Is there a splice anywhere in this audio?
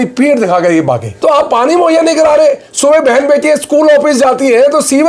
yes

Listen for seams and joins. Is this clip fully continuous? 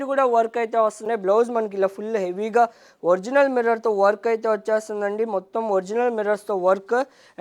no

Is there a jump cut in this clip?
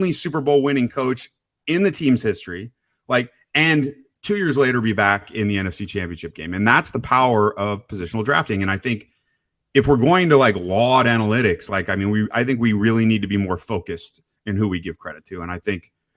yes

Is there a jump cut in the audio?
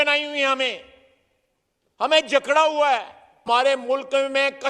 yes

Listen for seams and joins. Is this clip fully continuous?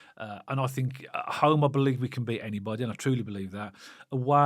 yes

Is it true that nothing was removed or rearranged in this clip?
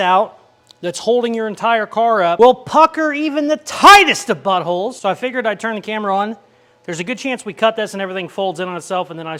yes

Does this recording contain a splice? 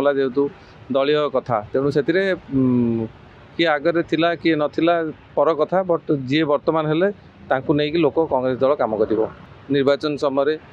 yes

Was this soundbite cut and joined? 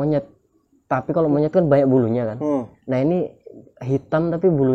no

